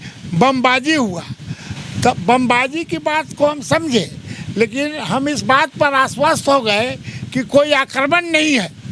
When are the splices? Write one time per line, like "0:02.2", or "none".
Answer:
none